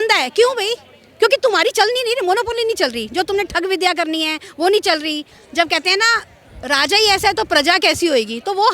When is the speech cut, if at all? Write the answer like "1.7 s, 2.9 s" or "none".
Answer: 5.3 s